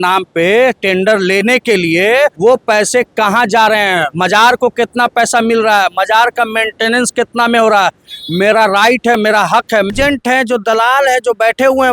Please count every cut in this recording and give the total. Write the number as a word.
three